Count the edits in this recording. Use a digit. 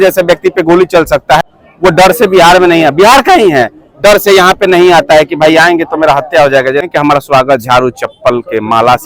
2